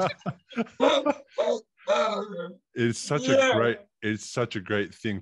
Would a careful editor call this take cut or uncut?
uncut